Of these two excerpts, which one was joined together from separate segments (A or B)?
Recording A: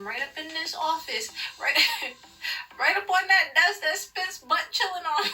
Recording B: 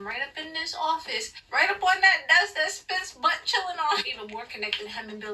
B